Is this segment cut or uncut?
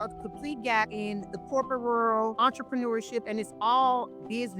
cut